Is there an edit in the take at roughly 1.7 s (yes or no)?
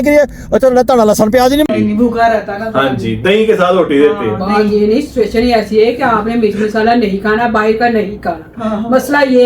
yes